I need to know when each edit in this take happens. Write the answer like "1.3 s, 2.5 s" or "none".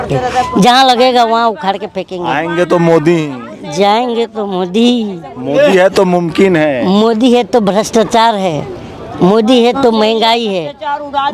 none